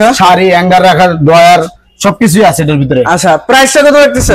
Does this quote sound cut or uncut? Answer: uncut